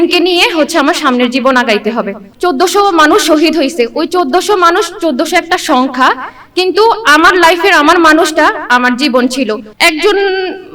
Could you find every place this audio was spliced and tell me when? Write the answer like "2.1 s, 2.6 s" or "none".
2.2 s, 9.6 s